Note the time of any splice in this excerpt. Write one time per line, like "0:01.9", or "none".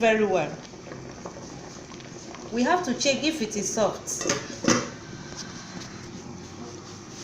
none